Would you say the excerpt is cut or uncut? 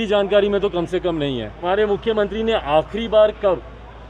cut